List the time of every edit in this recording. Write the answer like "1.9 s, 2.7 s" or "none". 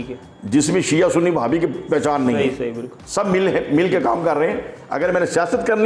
none